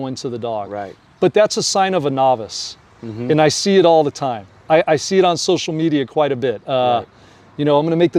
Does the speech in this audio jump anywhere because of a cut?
no; 0 cuts

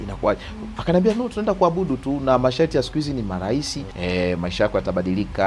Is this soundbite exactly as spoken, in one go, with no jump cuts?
no; 1 cut; at 3.8 s

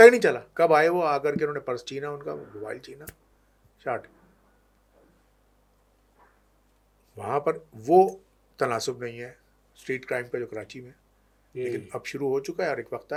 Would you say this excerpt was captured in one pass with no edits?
yes; 0 cuts

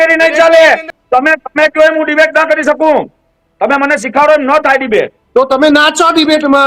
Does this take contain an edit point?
yes; 2 cuts; at 0.9 s, 5.2 s

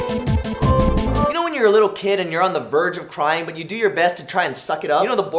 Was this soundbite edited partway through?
no; 0 cuts

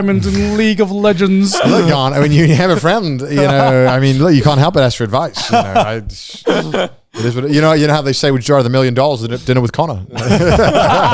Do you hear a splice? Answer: no; 0 cuts

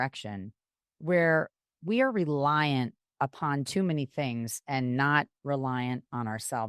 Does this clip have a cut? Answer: no; 0 cuts

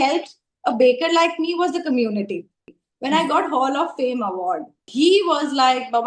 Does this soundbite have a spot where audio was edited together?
yes; 2 cuts; at 2.7 s, 4.8 s

